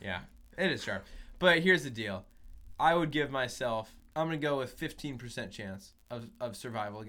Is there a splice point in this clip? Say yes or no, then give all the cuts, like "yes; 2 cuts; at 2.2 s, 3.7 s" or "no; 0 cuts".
yes; 1 cut; at 4.0 s